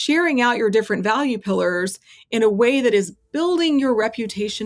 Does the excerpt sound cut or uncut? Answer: uncut